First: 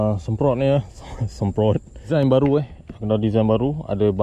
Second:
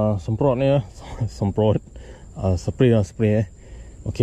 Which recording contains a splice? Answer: first; 1 cut; at 2.1 s

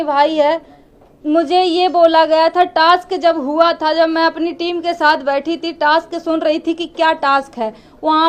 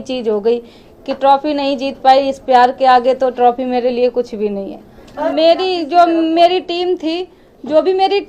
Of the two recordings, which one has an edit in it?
second; 1 cut; at 5.3 s

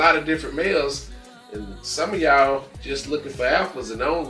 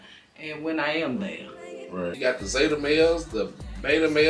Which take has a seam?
second; 1 cut; at 2.1 s

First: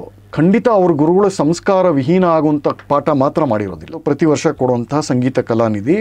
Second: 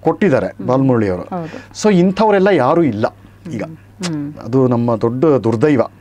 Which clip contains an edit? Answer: first; 1 cut; at 4.0 s

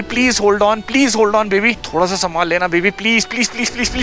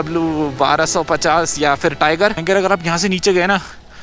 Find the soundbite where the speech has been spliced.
second; 1 cut; at 2.4 s

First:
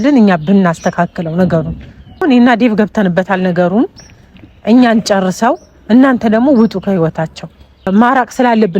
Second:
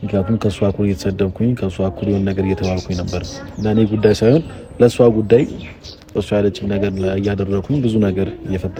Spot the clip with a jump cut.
first; 2 cuts; at 2.2 s, 7.9 s

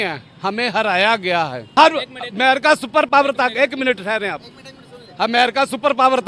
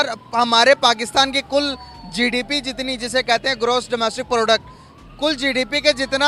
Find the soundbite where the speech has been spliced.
first; 1 cut; at 1.7 s

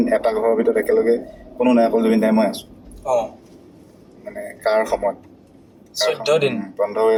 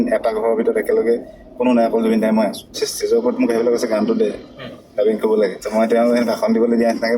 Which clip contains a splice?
second; 2 cuts; at 2.9 s, 5.6 s

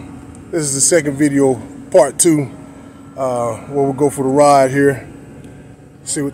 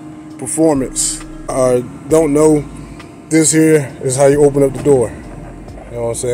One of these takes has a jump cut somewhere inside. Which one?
second; 1 cut; at 1.5 s

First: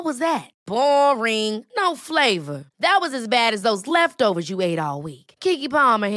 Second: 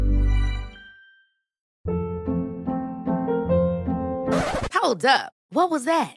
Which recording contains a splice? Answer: second; 1 cut; at 1.7 s

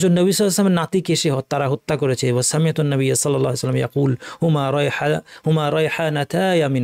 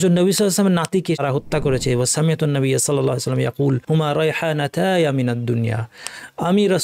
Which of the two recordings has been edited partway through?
second; 2 cuts; at 1.2 s, 3.8 s

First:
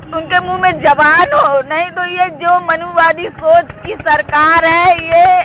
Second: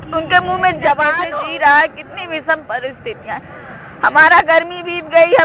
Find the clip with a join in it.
second; 1 cut; at 1.2 s

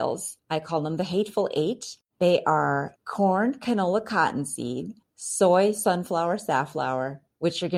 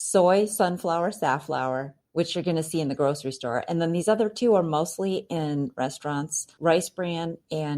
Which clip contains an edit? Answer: second; 1 cut; at 6.4 s

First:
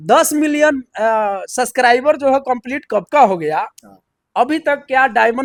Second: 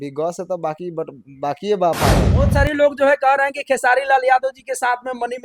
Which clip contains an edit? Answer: second; 1 cut; at 2.3 s

